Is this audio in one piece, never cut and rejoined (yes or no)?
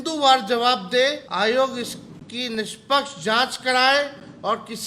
no